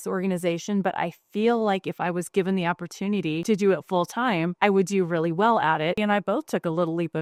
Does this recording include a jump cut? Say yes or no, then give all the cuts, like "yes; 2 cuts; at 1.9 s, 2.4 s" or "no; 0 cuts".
no; 0 cuts